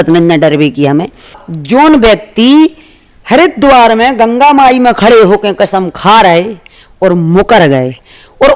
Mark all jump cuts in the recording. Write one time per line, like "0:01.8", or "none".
0:01.5